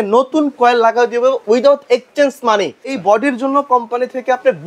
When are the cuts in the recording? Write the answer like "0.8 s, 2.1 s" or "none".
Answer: 1.4 s, 3.0 s